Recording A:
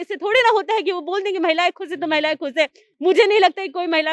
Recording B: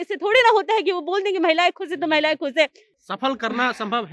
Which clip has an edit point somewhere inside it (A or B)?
B